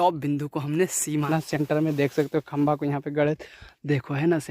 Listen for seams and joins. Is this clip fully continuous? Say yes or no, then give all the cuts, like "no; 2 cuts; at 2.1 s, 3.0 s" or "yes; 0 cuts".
no; 1 cut; at 1.2 s